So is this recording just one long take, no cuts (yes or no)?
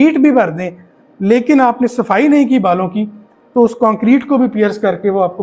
yes